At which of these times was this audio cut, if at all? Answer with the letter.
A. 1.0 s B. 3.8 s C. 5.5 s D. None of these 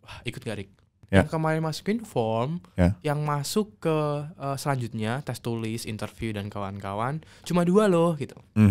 A